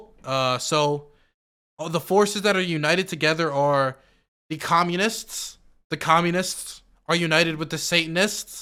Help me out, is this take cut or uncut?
uncut